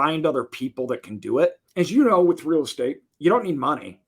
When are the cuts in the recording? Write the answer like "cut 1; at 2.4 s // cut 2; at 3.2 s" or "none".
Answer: cut 1; at 1.6 s // cut 2; at 3.1 s

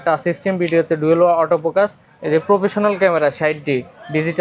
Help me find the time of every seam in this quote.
cut 1; at 2.1 s

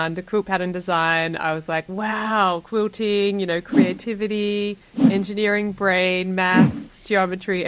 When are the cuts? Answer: none

